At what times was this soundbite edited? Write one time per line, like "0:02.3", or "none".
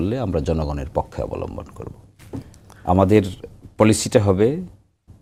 none